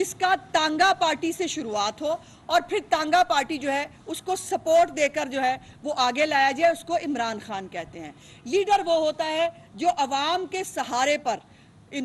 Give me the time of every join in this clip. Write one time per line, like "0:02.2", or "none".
none